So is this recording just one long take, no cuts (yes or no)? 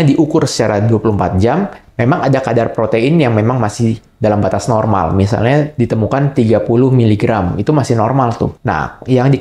yes